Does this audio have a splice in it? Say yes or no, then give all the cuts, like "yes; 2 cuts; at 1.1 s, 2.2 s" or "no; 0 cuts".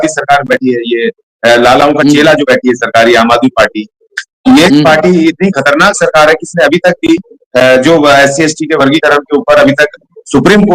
no; 0 cuts